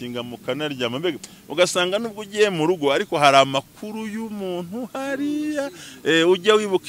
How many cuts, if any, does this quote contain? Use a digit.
0